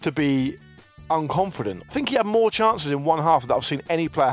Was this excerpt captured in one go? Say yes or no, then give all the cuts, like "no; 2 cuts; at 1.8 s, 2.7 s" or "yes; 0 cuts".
no; 1 cut; at 1.8 s